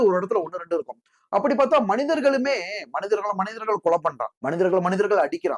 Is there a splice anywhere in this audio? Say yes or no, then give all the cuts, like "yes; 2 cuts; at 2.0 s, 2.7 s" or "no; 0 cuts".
yes; 1 cut; at 4.3 s